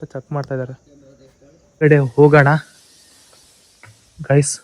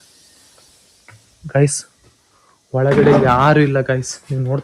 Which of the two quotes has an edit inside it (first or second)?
first